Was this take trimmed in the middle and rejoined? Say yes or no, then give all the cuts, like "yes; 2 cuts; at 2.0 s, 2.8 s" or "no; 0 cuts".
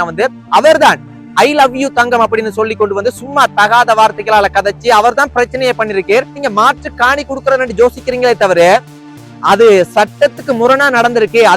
yes; 1 cut; at 6.3 s